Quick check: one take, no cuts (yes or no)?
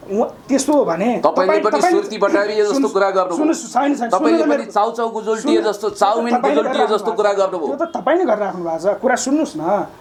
yes